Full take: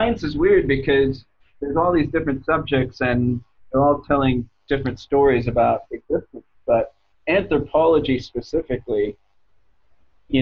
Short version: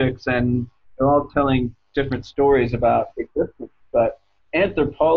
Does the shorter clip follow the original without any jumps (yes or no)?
yes